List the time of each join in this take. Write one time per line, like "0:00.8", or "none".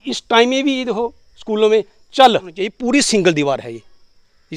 0:02.7